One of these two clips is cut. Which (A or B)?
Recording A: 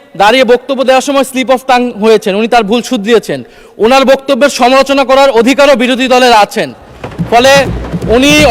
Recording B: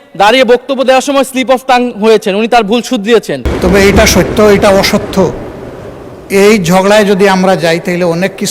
B